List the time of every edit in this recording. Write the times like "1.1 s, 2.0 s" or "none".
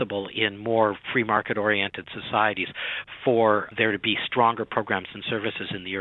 3.7 s